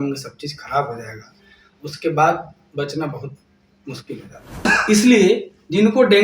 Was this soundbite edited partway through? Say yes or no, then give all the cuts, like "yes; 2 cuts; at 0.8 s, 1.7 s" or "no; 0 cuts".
yes; 1 cut; at 4.6 s